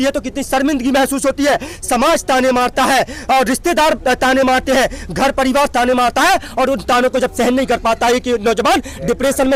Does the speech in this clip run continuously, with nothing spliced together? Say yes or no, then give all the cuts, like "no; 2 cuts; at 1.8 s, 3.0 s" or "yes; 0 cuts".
yes; 0 cuts